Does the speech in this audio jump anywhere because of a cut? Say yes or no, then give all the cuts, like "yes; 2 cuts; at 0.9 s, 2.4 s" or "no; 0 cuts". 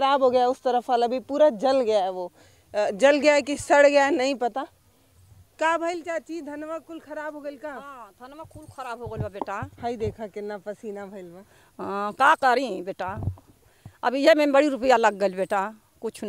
no; 0 cuts